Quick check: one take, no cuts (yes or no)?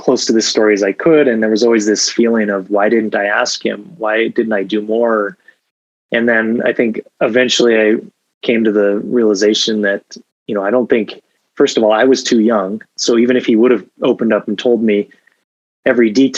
yes